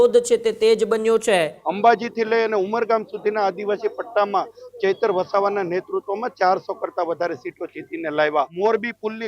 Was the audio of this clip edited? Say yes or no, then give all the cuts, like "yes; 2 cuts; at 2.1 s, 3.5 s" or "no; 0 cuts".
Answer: yes; 2 cuts; at 1.6 s, 8.5 s